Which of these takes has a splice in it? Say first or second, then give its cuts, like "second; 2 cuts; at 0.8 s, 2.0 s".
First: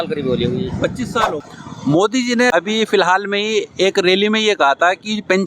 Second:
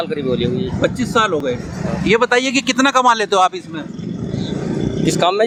first; 1 cut; at 1.4 s